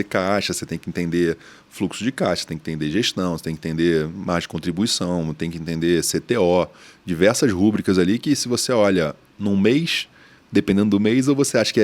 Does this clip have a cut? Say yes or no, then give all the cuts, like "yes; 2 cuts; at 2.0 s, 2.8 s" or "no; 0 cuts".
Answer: no; 0 cuts